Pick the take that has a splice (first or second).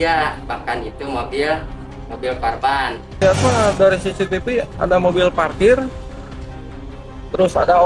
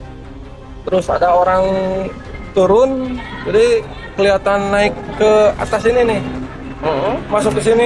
first